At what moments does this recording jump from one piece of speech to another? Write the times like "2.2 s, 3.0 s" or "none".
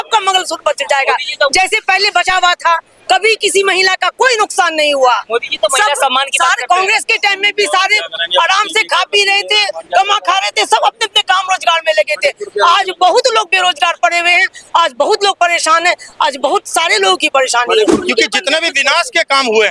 17.9 s

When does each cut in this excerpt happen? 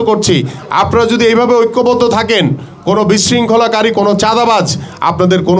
none

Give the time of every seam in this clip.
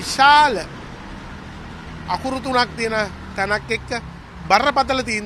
none

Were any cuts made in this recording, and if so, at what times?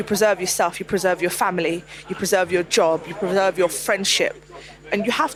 none

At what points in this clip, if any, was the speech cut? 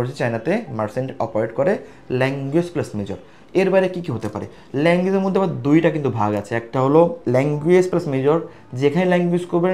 none

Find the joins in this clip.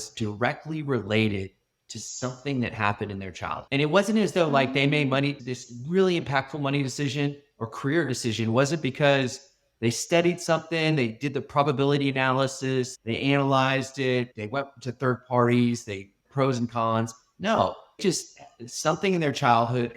none

